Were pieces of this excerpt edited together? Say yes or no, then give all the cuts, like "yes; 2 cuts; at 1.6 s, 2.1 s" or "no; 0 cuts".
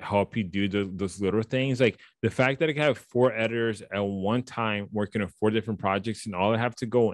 no; 0 cuts